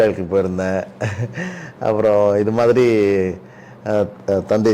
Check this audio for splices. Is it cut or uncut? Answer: uncut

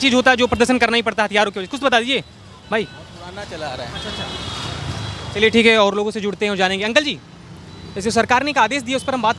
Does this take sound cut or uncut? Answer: uncut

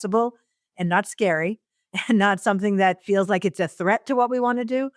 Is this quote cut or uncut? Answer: uncut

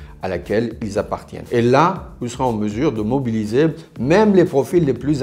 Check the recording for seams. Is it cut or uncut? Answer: cut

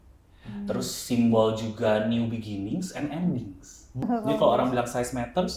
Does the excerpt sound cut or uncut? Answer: cut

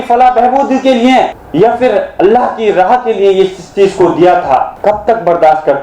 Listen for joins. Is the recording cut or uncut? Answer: cut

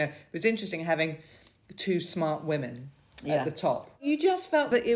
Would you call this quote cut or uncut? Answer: cut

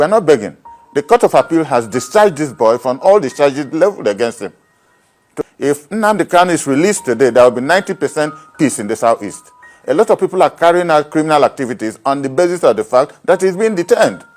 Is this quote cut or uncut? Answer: cut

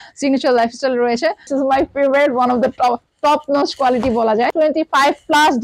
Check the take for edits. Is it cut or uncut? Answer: cut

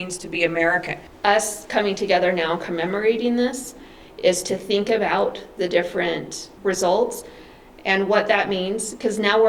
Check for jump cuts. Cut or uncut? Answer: cut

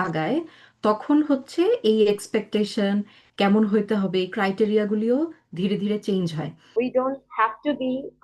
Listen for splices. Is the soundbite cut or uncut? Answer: cut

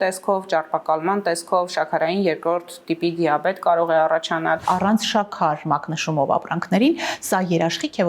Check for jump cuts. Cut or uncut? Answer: cut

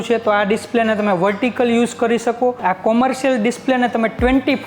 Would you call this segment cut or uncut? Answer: cut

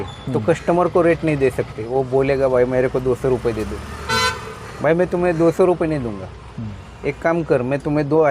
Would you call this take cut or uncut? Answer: cut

